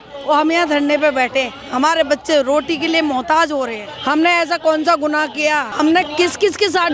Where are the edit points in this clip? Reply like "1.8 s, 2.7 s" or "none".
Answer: 3.9 s, 5.7 s